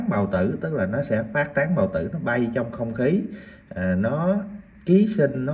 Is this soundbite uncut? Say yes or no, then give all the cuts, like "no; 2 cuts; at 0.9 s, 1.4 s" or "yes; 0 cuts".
yes; 0 cuts